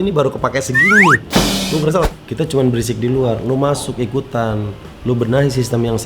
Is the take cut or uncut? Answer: cut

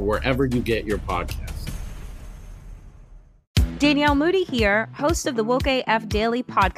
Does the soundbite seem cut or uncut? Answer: cut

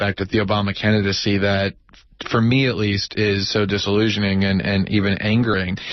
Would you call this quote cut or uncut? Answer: cut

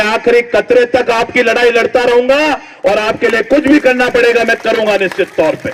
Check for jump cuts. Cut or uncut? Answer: uncut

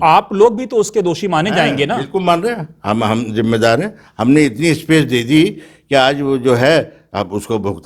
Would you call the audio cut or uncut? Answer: uncut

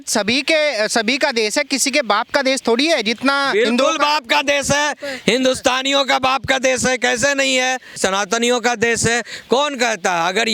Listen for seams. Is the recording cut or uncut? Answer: cut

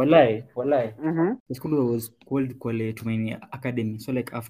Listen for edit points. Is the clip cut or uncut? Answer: cut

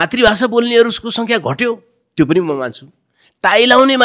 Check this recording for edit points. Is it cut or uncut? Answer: uncut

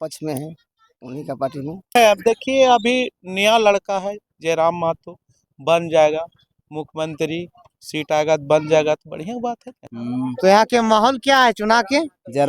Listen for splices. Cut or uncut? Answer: cut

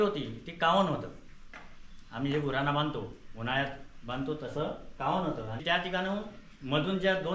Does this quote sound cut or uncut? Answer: cut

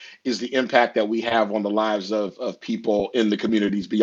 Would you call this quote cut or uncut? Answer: uncut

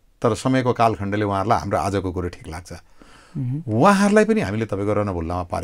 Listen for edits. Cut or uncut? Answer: uncut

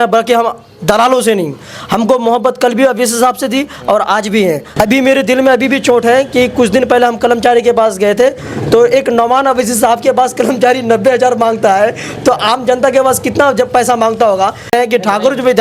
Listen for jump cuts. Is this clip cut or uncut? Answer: cut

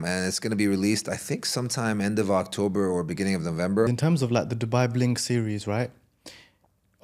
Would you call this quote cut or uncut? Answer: cut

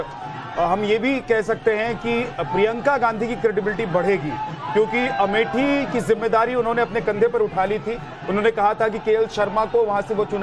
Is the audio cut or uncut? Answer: uncut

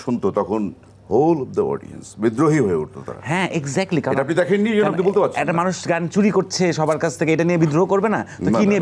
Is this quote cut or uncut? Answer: uncut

